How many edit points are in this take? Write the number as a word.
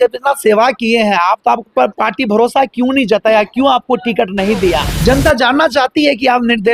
one